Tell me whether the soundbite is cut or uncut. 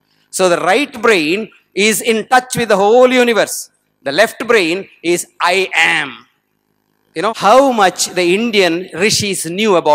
cut